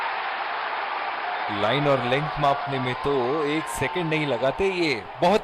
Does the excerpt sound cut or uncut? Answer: cut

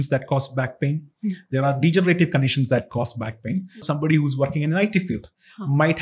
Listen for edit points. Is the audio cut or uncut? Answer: cut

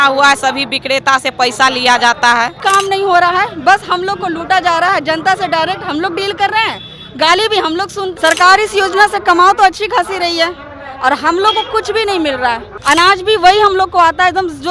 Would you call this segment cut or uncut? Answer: cut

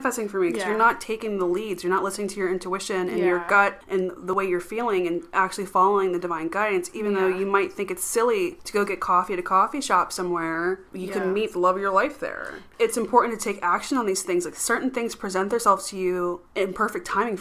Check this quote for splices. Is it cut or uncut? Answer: cut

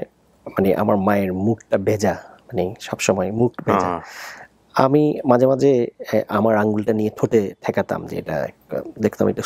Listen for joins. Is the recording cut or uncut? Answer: uncut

